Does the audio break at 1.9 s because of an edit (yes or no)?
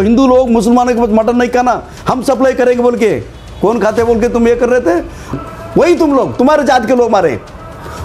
no